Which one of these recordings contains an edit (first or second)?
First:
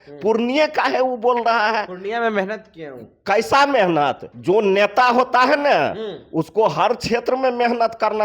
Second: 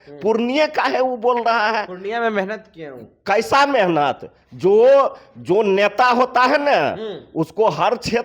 first